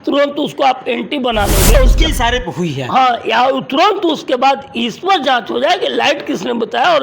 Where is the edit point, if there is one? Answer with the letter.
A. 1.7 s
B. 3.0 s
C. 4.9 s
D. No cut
A